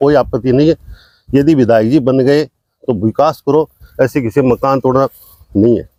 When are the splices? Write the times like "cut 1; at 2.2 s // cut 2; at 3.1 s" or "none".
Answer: none